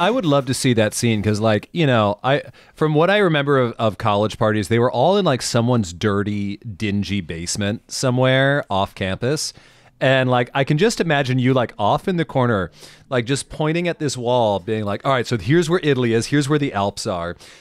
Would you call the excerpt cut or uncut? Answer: uncut